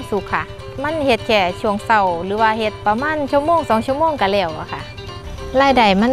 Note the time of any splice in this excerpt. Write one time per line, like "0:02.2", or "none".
0:02.8
0:05.2